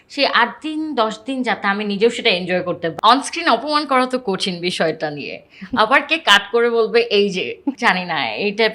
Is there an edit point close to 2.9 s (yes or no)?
yes